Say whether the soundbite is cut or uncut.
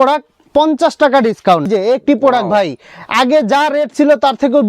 cut